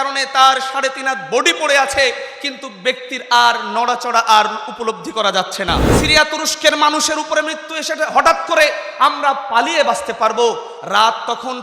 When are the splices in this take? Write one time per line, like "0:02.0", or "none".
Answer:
0:05.9